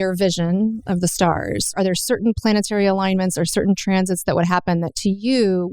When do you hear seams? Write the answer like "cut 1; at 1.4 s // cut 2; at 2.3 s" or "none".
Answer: cut 1; at 1.7 s

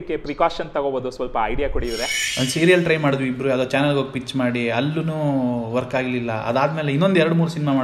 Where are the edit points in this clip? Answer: cut 1; at 2.1 s

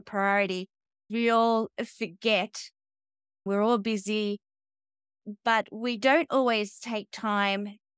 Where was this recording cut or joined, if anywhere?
cut 1; at 1.1 s // cut 2; at 3.4 s

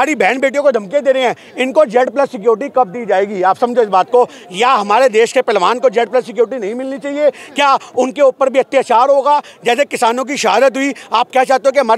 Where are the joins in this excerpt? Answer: none

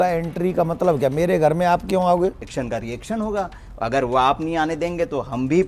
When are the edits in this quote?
cut 1; at 2.4 s

